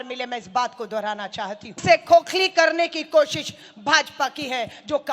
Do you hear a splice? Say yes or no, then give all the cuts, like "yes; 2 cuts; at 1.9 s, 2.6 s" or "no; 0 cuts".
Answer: yes; 1 cut; at 1.8 s